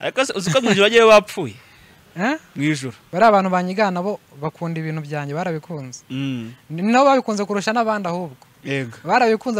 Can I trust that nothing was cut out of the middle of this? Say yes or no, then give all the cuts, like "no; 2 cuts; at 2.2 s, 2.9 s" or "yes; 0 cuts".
no; 1 cut; at 3.0 s